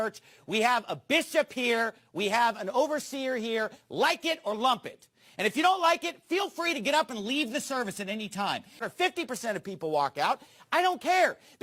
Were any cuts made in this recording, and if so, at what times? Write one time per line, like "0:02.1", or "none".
none